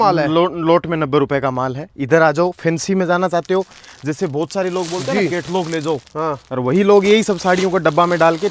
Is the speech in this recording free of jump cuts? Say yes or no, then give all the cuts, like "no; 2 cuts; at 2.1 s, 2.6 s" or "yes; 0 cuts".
yes; 0 cuts